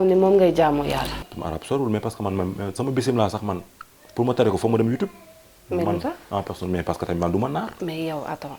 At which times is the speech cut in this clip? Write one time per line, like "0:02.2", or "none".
0:01.3